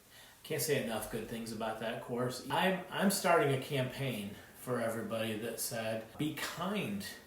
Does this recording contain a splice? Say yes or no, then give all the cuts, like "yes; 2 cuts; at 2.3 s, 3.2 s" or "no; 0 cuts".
yes; 2 cuts; at 2.4 s, 6.1 s